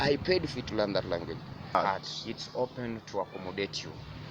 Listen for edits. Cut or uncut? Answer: cut